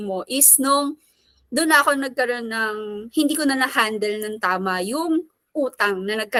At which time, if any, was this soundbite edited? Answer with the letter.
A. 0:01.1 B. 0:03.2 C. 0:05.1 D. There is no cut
D